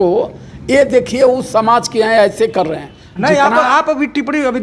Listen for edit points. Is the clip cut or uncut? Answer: uncut